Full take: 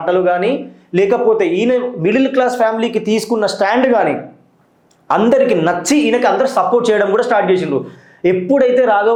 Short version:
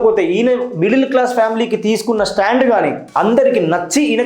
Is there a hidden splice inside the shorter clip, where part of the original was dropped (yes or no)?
yes